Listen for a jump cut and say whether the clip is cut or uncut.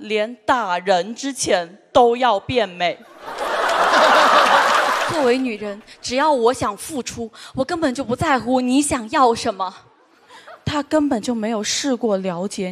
cut